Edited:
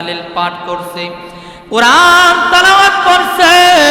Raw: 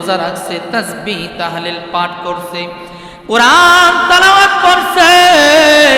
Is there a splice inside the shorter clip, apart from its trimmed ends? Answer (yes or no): no